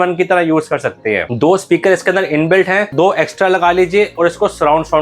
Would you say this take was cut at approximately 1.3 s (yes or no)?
yes